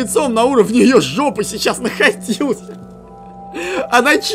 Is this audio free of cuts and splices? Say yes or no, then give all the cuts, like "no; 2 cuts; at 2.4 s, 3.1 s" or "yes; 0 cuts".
yes; 0 cuts